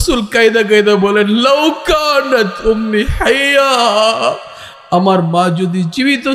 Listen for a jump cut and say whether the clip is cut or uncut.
uncut